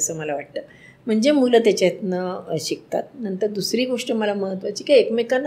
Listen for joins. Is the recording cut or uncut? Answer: uncut